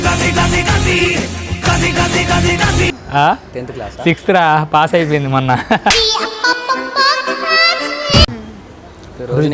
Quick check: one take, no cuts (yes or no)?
no